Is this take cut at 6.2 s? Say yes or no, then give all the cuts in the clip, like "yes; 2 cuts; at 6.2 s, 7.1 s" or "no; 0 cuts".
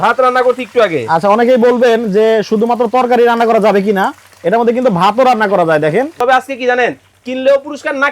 yes; 1 cut; at 6.2 s